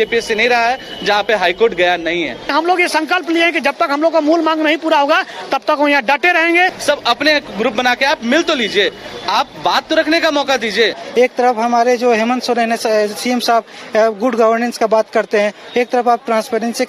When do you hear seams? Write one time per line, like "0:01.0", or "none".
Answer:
0:02.4
0:06.8
0:11.0